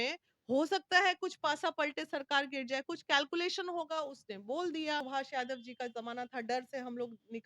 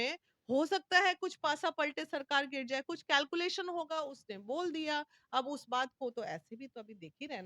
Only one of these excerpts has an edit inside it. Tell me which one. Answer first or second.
first